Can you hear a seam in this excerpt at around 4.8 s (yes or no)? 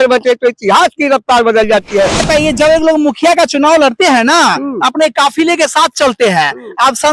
no